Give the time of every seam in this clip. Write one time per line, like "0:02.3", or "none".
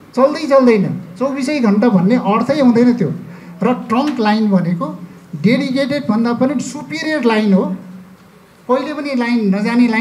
0:03.4